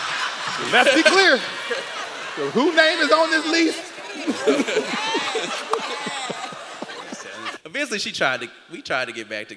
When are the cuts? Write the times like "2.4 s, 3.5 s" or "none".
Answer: 7.6 s